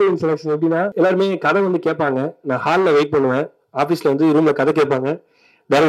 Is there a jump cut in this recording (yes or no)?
yes